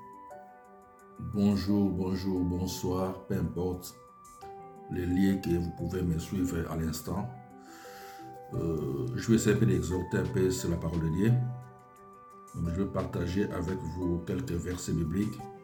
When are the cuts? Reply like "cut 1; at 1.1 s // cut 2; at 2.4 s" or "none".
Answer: none